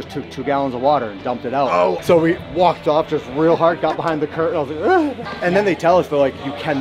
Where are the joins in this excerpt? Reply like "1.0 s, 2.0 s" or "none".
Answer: 2.0 s, 5.3 s

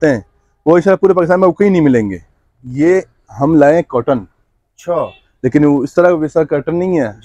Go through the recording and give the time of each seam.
2.6 s

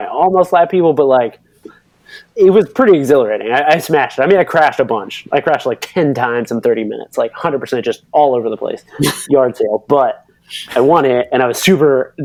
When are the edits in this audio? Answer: none

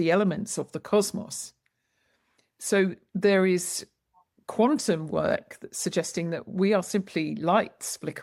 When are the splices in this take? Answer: none

